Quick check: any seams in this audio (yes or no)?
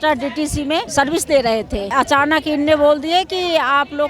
yes